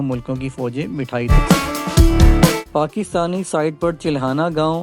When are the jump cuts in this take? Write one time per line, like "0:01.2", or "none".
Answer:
0:01.3
0:02.6